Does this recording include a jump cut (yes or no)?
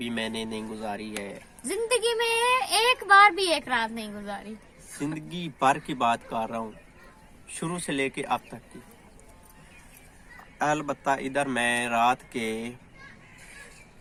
no